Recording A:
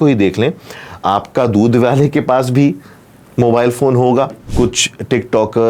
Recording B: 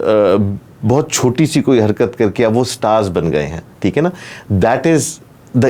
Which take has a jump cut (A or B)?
A